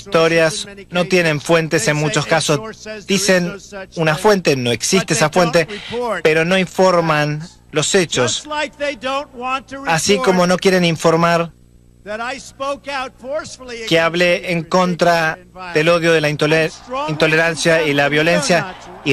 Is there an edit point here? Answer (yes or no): no